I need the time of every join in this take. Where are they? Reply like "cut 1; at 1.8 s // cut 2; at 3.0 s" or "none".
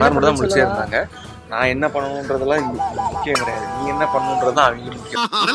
none